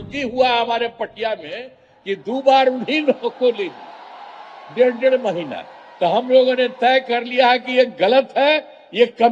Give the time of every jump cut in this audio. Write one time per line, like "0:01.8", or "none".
none